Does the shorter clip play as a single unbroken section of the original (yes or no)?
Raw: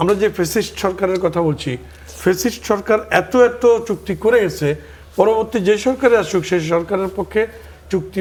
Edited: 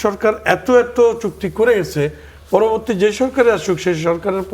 yes